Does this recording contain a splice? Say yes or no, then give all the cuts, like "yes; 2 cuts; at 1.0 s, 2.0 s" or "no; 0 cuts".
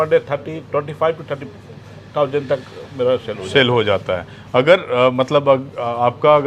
no; 0 cuts